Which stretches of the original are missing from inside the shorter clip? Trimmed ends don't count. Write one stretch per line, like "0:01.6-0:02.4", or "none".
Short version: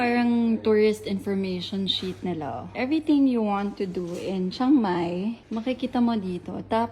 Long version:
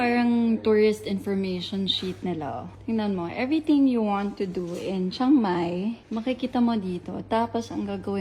0:02.7-0:03.3